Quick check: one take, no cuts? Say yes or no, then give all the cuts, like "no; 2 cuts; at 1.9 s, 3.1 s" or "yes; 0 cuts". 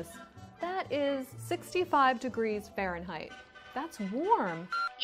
yes; 0 cuts